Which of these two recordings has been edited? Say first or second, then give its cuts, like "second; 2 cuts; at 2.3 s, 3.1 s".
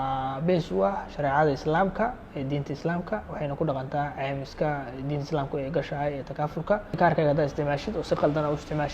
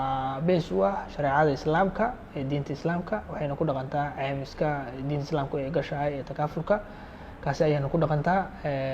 first; 1 cut; at 7.0 s